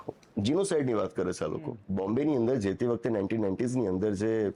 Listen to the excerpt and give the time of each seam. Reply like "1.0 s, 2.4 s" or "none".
1.8 s